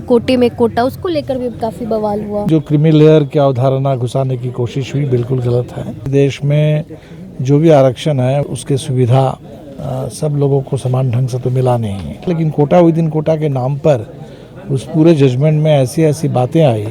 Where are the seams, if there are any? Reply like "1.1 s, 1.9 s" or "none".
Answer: 2.5 s, 6.1 s, 8.5 s, 12.3 s

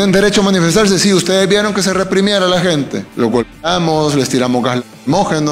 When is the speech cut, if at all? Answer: 3.0 s

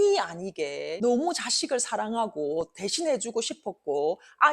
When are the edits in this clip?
none

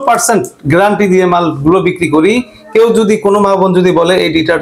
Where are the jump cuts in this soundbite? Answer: none

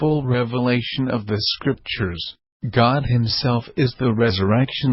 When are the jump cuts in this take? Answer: 4.0 s

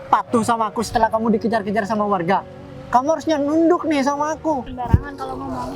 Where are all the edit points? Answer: 4.7 s

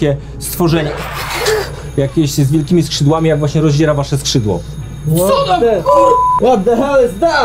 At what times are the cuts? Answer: none

